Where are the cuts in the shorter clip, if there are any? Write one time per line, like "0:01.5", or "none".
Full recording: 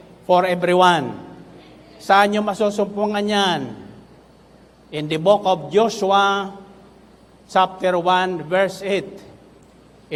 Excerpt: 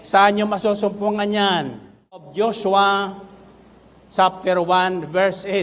0:02.3